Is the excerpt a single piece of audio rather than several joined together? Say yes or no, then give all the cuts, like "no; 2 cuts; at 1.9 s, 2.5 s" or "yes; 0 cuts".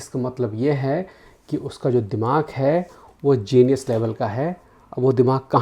yes; 0 cuts